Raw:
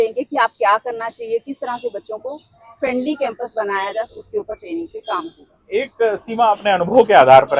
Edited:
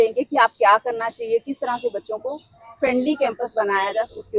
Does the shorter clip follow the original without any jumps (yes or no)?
yes